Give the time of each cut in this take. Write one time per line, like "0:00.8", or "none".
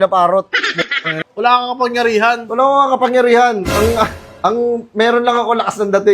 0:01.1